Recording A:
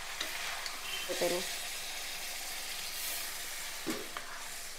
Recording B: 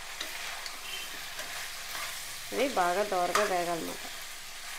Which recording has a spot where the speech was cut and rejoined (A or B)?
A